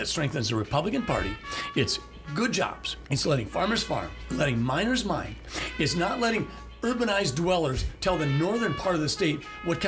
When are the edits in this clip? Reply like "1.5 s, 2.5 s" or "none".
2.9 s, 4.2 s